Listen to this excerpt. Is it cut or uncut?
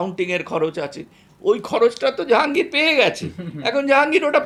uncut